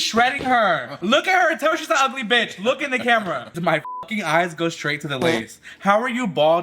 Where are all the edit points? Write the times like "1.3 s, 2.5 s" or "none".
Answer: 0.9 s, 3.5 s